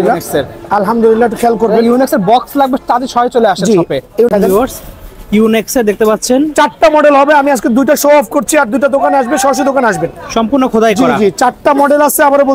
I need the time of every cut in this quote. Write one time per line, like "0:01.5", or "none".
0:04.3